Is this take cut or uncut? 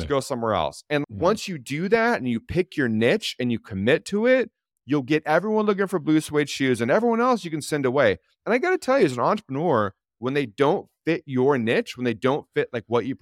uncut